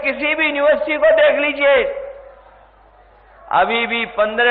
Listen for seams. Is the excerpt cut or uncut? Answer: uncut